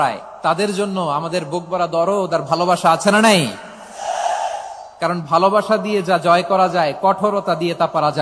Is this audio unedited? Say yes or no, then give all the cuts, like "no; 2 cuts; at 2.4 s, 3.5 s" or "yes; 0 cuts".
yes; 0 cuts